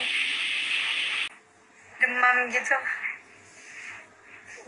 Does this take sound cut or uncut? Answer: cut